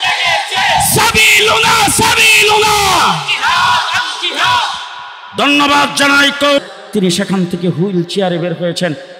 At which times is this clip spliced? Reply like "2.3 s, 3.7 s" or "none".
6.6 s